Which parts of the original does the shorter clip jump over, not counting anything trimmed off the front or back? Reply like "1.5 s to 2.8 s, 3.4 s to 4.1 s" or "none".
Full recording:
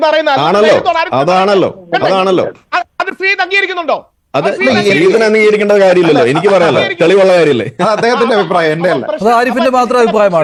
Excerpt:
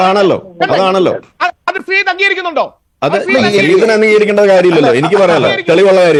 none